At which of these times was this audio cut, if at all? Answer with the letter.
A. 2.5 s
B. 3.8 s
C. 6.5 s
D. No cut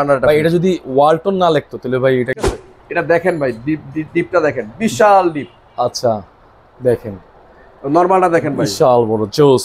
A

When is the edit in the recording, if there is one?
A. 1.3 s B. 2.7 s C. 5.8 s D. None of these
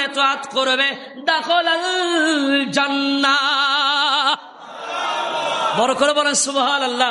D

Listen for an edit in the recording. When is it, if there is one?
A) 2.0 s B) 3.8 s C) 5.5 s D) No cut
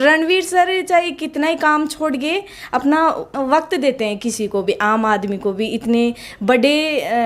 D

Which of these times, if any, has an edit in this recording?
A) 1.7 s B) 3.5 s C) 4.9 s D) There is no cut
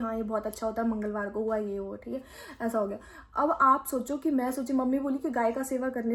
D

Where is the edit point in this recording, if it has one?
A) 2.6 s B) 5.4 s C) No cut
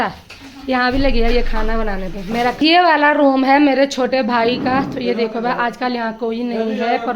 A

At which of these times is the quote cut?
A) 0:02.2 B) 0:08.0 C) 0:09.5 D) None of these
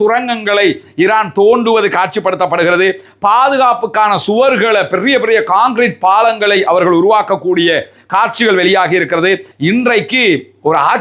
C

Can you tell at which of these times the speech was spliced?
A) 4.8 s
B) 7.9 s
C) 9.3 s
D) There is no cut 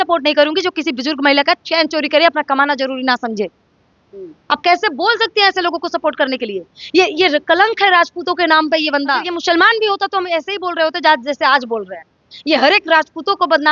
C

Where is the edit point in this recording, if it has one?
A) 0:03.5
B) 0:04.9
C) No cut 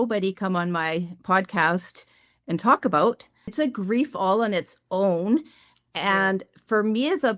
A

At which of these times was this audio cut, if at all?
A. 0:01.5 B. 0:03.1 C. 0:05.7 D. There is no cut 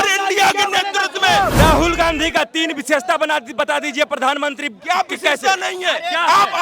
A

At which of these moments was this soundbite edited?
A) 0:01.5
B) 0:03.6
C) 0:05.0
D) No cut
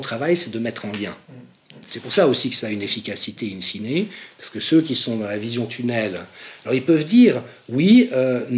D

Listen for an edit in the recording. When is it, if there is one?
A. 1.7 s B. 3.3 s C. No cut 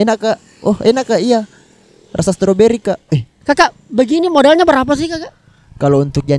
B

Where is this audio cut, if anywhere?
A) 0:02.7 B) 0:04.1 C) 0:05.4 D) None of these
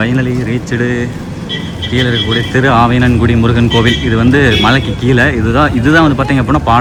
D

